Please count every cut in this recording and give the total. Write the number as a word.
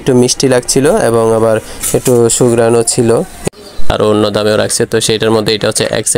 one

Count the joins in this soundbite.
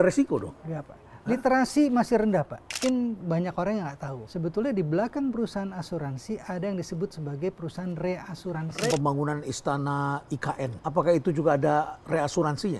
four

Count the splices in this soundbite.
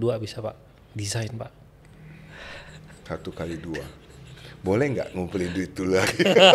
one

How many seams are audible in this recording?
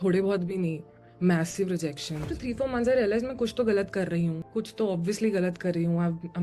one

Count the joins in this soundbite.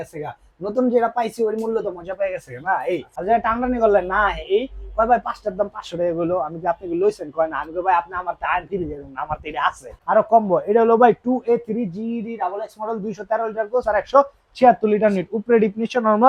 two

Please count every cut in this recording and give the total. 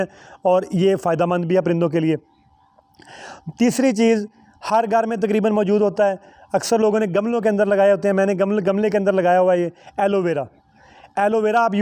zero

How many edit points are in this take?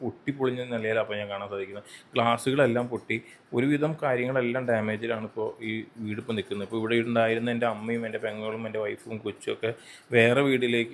zero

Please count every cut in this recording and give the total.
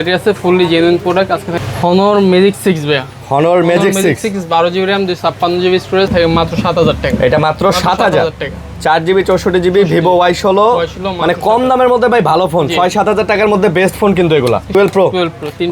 three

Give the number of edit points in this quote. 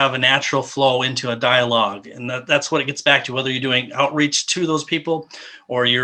zero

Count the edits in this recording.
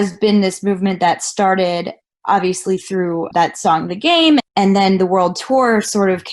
one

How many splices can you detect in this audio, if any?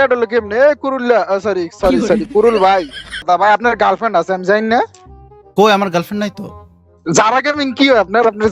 one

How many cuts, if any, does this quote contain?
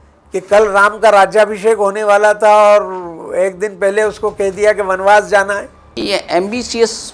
one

